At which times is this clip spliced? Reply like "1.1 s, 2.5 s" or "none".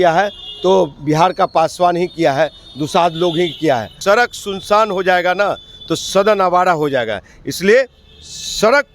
3.9 s